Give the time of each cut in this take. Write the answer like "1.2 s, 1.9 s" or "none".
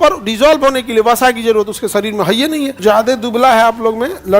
2.8 s